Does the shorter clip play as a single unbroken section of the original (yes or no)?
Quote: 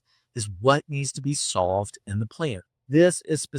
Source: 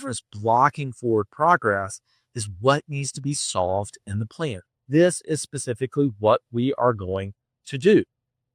yes